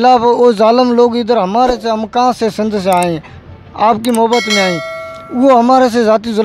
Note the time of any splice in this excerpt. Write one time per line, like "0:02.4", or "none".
none